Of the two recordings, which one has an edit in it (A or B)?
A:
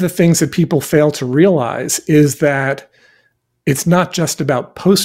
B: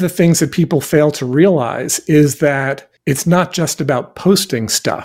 B